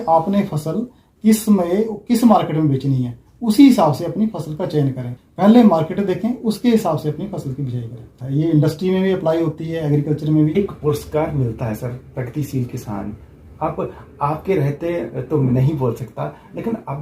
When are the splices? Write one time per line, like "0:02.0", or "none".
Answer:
0:05.2
0:08.2
0:10.5